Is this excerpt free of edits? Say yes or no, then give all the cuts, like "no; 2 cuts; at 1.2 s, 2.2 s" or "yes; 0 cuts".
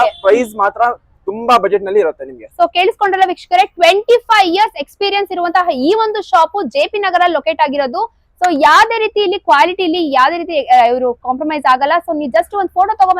yes; 0 cuts